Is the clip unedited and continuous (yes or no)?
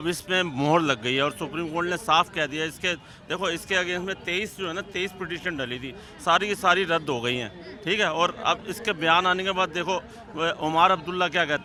yes